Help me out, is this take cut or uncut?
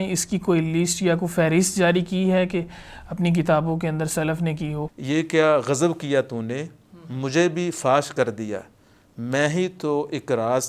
cut